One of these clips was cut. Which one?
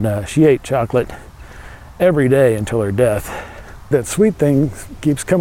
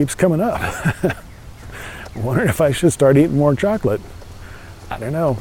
first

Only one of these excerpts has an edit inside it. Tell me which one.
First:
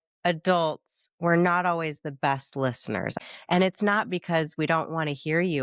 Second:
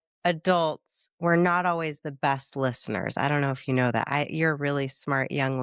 first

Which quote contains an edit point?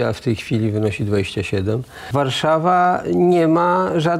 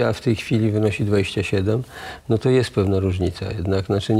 first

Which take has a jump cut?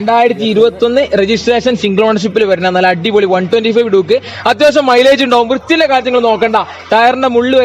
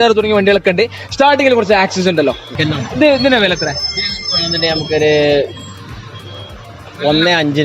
second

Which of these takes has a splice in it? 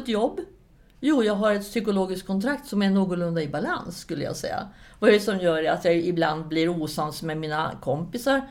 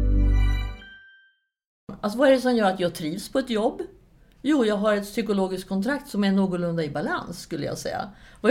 second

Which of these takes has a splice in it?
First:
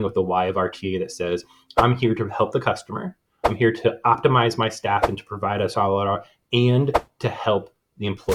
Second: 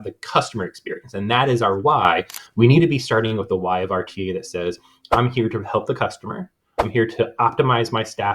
second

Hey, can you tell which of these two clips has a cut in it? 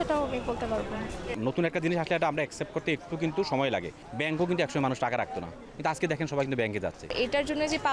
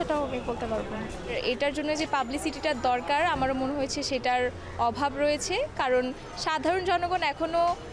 first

